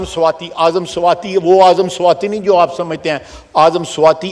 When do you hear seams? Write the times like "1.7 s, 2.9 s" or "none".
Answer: none